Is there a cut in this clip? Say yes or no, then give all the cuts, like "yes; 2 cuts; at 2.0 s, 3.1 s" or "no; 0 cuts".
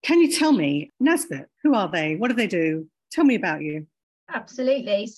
yes; 1 cut; at 0.9 s